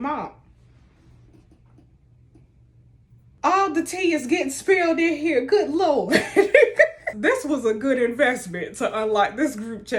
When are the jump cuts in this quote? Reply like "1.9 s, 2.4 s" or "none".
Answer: 3.4 s, 7.1 s